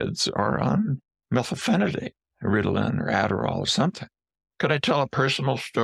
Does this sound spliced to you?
yes; 2 cuts; at 1.1 s, 4.2 s

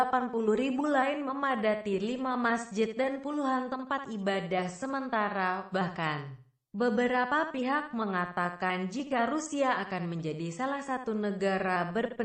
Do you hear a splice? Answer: no; 0 cuts

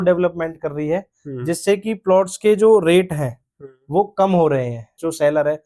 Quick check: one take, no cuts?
yes; 0 cuts

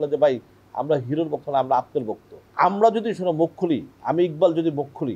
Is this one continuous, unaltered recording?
no; 2 cuts; at 2.4 s, 3.9 s

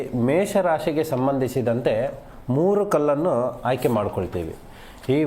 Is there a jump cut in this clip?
no; 0 cuts

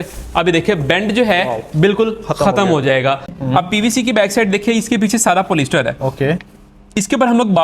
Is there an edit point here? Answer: yes; 1 cut; at 3.3 s

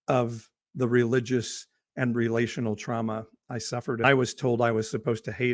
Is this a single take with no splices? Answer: no; 1 cut; at 4.0 s

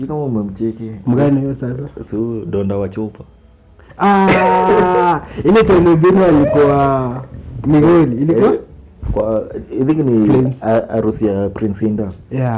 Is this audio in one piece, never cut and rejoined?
yes; 0 cuts

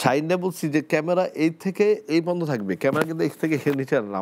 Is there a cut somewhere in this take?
no; 0 cuts

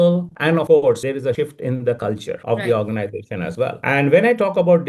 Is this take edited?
no; 0 cuts

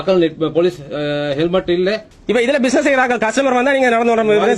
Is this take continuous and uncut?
no; 1 cut; at 2.1 s

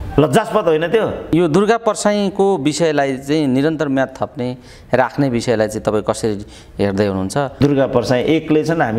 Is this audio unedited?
no; 2 cuts; at 1.3 s, 7.6 s

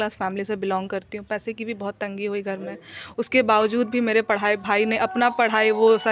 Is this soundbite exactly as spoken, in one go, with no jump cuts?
yes; 0 cuts

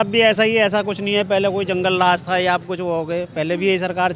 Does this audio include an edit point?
no; 0 cuts

